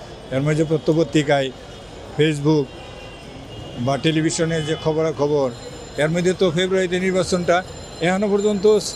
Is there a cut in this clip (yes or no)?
no